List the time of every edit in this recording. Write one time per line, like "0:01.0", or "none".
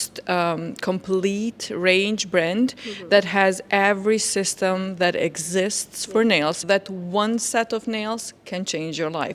0:06.6